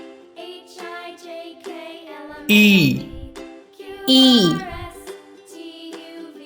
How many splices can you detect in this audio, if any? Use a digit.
2